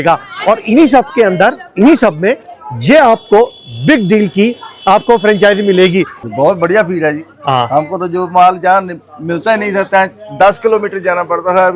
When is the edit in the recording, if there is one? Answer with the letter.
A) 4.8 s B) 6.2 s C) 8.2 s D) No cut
B